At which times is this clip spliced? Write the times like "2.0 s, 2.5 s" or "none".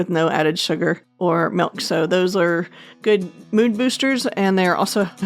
1.1 s